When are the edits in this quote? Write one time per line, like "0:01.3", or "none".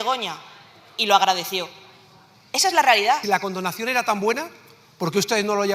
0:03.2